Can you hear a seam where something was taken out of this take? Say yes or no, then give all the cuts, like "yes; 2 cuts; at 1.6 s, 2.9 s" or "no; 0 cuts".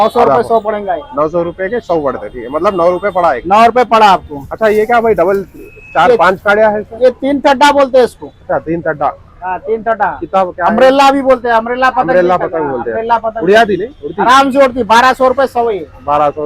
no; 0 cuts